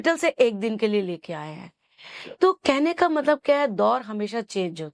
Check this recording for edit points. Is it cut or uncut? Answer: uncut